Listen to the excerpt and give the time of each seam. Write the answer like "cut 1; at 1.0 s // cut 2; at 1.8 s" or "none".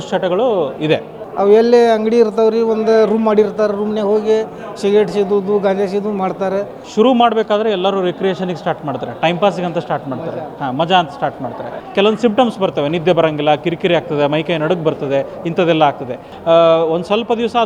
cut 1; at 1.2 s // cut 2; at 6.8 s // cut 3; at 11.8 s // cut 4; at 16.3 s